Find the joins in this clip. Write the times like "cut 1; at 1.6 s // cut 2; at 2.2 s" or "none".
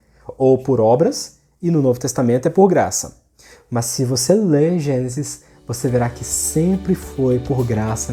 none

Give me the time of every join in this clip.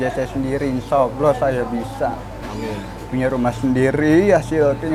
none

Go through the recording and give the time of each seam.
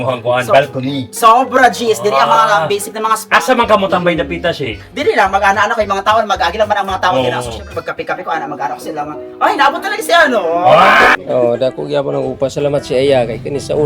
cut 1; at 11.1 s

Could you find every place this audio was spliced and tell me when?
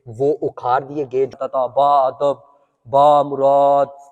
cut 1; at 1.3 s

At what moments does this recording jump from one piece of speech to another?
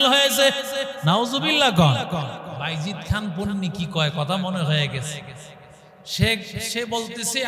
cut 1; at 2.5 s

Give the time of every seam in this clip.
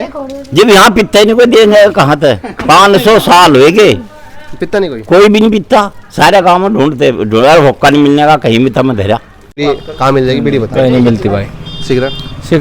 cut 1; at 9.6 s

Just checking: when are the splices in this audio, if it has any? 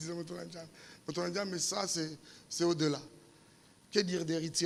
none

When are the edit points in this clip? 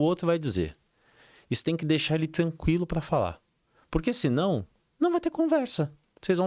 none

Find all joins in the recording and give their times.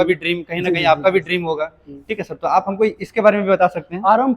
cut 1; at 1.8 s

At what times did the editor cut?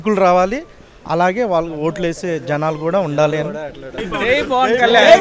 cut 1; at 3.9 s

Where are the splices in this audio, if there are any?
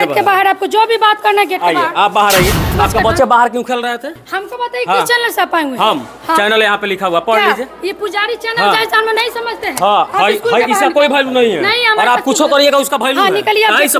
cut 1; at 2.7 s // cut 2; at 4.2 s

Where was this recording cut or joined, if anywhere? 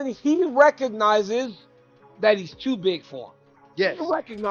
none

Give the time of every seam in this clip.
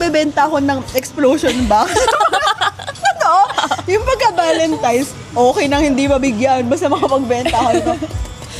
none

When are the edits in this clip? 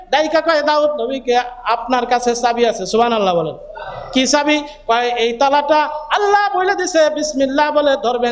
none

